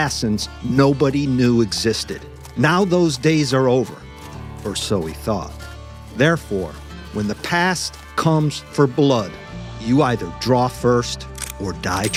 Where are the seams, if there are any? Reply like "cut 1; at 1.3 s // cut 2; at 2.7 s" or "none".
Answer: none